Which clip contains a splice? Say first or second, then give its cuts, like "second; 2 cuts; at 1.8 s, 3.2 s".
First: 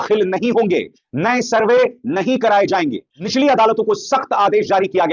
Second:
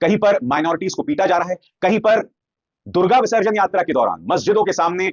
first; 1 cut; at 3.2 s